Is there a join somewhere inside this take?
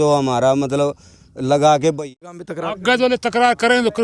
yes; 1 cut; at 2.3 s

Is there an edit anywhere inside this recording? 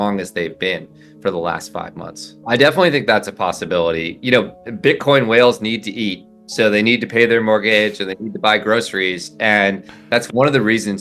no; 0 cuts

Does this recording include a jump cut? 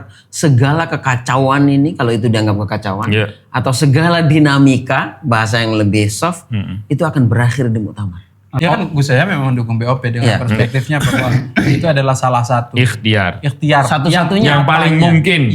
yes; 1 cut; at 8.5 s

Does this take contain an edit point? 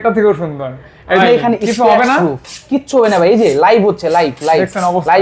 yes; 1 cut; at 1.2 s

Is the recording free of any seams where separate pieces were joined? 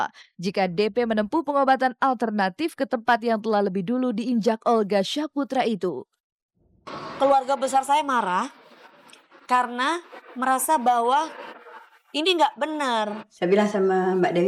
yes; 0 cuts

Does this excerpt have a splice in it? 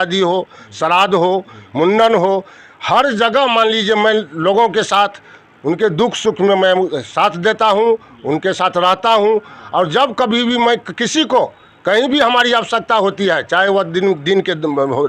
no; 0 cuts

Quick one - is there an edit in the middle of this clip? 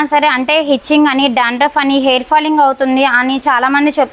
no; 0 cuts

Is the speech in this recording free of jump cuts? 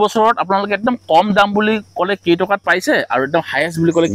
yes; 0 cuts

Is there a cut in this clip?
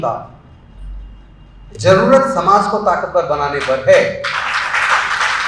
no; 0 cuts

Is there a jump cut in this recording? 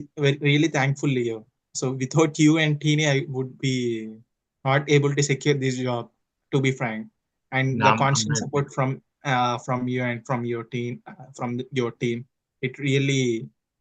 no; 0 cuts

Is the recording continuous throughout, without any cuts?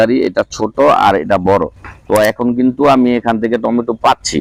yes; 0 cuts

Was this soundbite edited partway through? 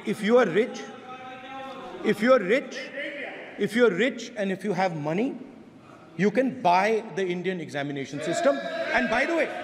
no; 0 cuts

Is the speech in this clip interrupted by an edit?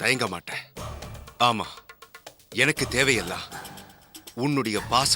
no; 0 cuts

